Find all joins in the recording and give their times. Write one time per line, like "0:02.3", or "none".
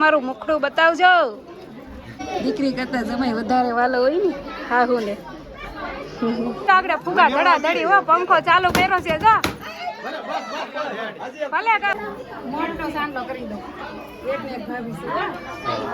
0:02.1
0:06.6
0:11.9

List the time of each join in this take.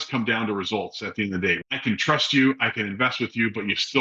0:01.6

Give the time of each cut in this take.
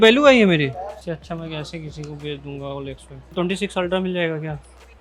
0:01.0
0:03.2

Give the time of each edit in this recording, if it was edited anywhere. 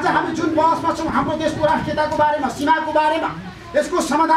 none

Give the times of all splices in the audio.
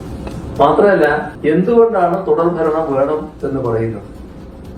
0:01.3

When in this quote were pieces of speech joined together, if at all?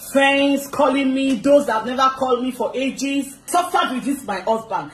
0:03.4

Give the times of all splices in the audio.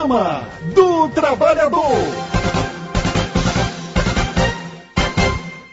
0:02.2

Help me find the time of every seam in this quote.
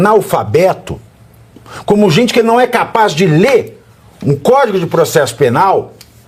none

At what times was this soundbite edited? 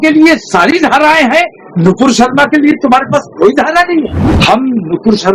0:04.2

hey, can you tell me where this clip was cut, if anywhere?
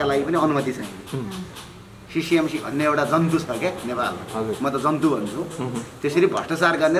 none

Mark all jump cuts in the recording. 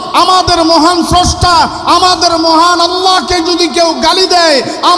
none

